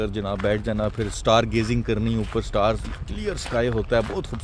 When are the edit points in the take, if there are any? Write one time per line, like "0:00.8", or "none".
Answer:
none